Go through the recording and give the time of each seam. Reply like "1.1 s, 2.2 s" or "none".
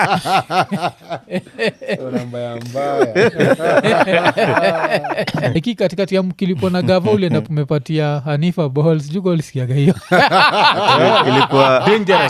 5.5 s